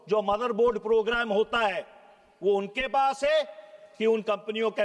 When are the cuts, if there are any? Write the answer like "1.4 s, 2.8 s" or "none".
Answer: none